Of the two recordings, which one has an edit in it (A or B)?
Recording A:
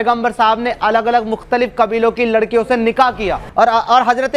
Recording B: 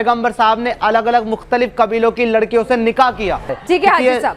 A